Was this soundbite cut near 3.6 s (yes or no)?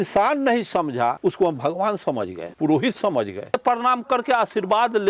yes